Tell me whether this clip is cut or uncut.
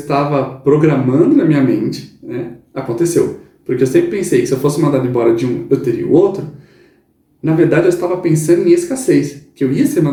uncut